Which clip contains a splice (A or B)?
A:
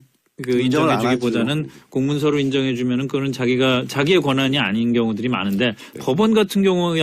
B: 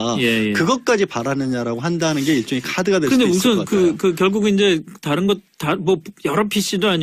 A